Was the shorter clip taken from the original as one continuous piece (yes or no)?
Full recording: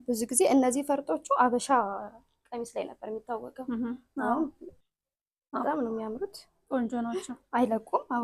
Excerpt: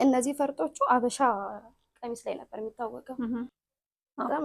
no